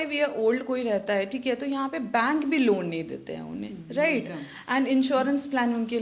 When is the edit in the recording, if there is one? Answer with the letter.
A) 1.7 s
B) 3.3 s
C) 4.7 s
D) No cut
D